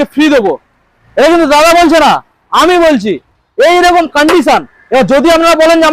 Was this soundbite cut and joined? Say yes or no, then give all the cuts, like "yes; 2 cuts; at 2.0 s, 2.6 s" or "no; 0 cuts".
no; 0 cuts